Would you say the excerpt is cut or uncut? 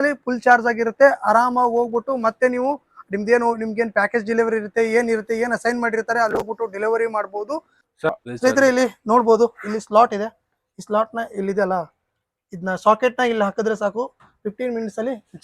cut